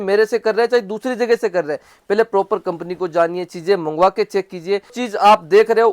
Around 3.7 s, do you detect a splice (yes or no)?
no